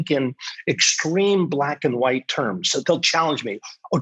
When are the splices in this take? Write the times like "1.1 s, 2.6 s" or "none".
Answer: 2.8 s